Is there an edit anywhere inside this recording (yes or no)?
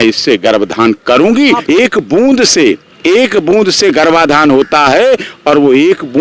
yes